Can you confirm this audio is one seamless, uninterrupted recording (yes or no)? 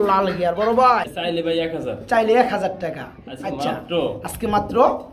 no